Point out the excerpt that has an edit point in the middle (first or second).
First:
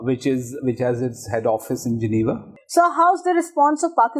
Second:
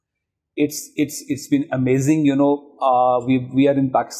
first